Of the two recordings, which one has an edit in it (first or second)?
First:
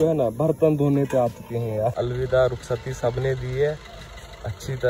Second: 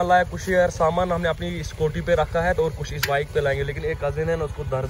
first